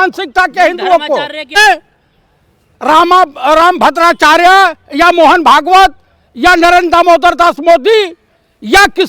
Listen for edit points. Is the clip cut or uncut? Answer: cut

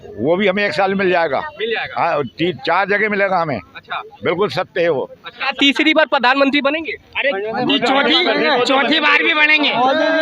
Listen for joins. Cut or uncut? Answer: cut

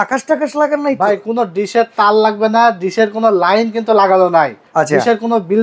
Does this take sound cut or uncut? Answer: cut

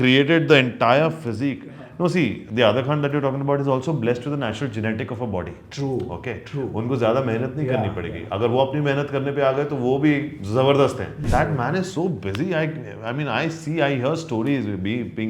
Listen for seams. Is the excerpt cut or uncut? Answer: cut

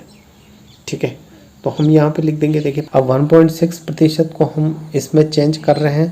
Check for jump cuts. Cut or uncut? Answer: cut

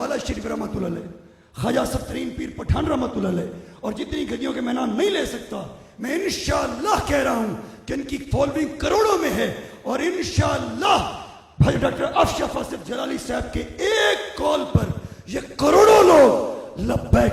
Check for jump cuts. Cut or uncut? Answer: uncut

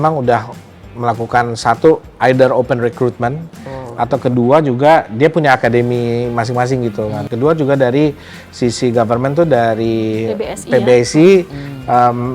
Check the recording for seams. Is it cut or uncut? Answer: cut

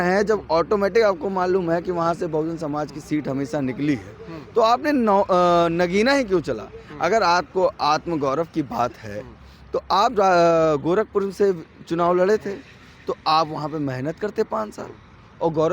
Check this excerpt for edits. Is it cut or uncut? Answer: uncut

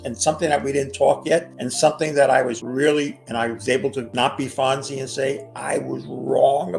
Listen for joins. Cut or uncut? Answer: cut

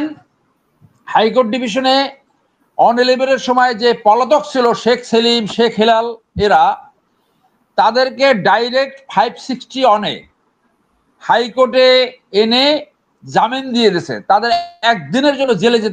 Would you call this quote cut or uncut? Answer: uncut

